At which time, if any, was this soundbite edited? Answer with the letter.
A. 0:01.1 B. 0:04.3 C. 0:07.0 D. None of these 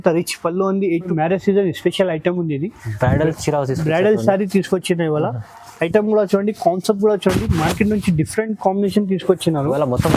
A